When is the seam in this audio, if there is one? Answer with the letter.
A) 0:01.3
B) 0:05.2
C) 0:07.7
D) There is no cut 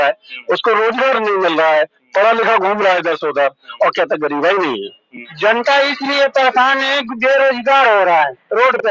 B